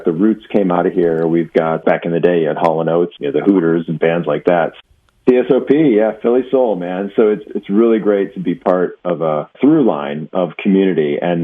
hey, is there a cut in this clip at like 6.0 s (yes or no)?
no